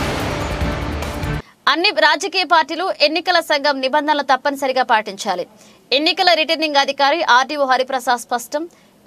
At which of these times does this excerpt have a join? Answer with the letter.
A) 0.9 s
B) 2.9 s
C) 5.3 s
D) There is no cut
A